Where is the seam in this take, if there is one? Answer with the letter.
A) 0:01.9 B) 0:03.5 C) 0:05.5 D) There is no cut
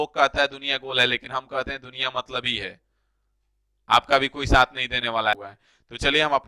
C